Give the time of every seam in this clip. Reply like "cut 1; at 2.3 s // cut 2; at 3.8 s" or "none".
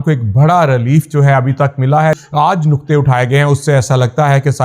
cut 1; at 2.2 s